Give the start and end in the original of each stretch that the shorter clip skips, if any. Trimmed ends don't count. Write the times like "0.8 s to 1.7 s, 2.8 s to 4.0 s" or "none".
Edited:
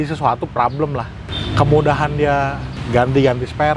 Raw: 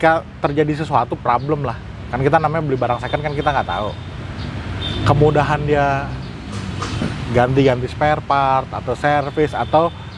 1.9 s to 4.7 s, 6.2 s to 7.2 s